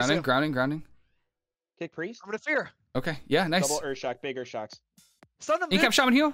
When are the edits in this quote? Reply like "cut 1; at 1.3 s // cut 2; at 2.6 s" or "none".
none